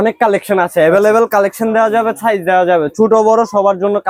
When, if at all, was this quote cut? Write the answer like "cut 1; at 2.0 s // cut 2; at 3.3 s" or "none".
none